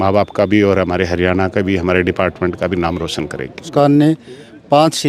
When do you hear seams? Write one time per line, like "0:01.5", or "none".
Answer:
0:03.7